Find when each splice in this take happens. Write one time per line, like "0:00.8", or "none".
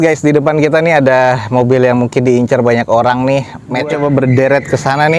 0:03.9